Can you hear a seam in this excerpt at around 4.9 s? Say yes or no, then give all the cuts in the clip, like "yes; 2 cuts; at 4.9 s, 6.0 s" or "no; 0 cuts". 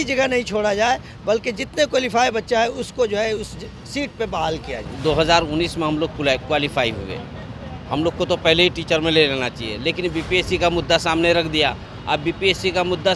yes; 1 cut; at 4.9 s